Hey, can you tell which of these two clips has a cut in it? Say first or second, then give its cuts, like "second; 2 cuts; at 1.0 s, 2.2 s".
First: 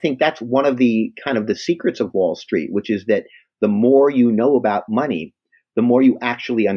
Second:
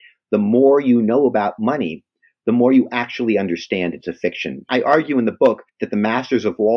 second; 2 cuts; at 4.7 s, 5.7 s